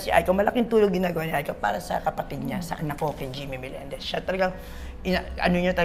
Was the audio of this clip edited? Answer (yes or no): no